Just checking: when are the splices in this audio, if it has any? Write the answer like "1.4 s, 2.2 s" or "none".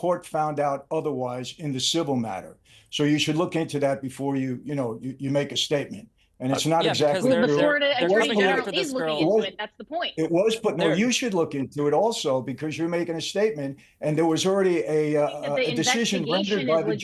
none